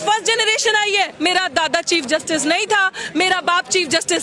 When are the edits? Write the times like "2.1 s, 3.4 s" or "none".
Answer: 1.1 s